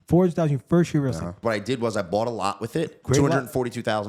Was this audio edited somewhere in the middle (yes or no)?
yes